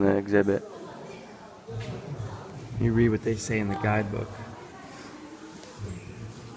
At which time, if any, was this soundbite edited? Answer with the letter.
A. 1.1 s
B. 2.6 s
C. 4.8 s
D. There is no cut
A